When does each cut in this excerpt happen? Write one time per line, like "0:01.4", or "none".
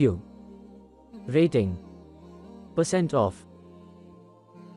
0:03.3